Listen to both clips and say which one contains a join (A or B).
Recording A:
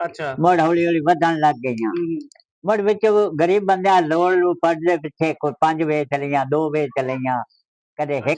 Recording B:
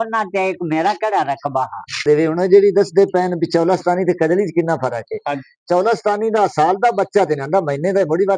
B